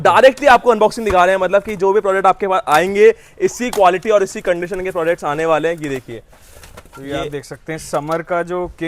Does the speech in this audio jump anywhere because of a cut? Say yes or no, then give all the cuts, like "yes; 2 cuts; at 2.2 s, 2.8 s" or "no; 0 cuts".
no; 0 cuts